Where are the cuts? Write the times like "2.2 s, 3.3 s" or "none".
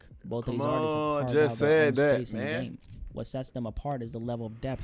none